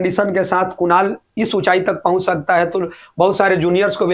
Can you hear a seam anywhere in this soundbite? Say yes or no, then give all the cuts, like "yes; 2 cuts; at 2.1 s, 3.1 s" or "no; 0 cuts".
no; 0 cuts